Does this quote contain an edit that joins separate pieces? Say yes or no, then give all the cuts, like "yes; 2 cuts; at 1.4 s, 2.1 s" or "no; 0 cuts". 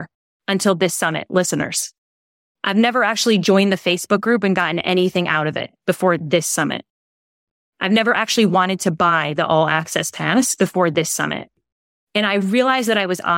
yes; 1 cut; at 11.5 s